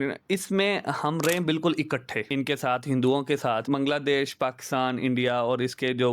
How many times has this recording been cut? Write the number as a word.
two